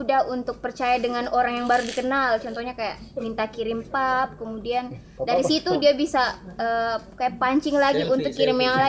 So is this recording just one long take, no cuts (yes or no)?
yes